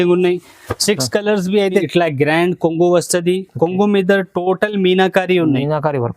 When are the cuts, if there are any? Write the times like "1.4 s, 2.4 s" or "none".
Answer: 1.9 s